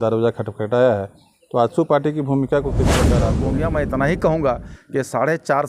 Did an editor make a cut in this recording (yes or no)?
yes